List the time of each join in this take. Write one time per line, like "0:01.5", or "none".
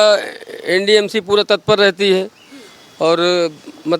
none